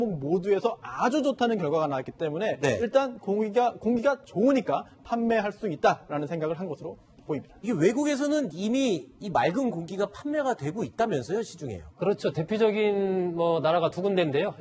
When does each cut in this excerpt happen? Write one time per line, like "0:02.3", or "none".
0:03.3